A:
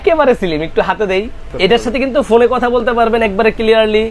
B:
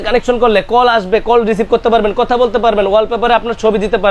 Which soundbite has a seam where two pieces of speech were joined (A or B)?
A